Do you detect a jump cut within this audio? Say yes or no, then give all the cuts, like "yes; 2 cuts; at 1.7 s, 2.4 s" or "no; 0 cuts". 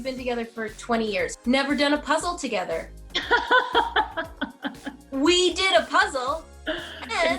yes; 1 cut; at 1.3 s